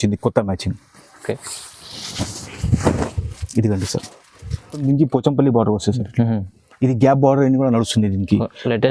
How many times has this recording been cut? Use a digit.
1